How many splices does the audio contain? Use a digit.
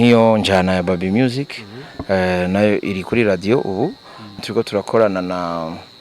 1